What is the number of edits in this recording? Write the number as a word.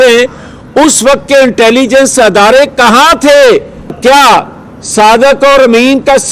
one